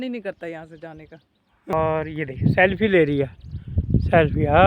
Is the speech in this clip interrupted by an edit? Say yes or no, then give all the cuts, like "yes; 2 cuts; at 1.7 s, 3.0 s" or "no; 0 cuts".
yes; 1 cut; at 1.7 s